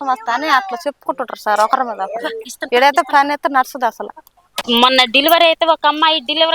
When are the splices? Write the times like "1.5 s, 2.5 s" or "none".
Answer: 4.3 s